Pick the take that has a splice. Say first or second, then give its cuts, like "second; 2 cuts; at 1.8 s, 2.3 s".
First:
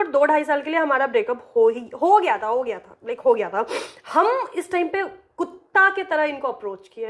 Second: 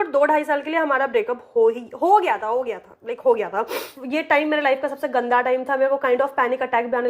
second; 1 cut; at 3.9 s